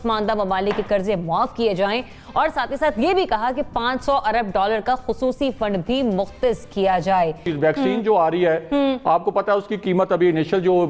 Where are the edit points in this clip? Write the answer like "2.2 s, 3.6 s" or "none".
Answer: 7.4 s